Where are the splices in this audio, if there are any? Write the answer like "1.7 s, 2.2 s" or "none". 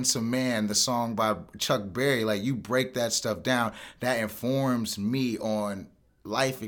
none